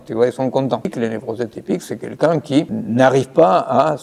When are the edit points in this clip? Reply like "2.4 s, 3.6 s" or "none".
0.9 s, 2.7 s